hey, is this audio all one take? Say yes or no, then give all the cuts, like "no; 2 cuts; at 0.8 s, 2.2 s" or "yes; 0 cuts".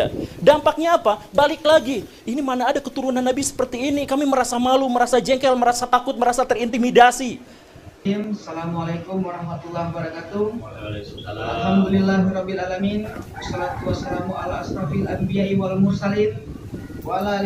yes; 0 cuts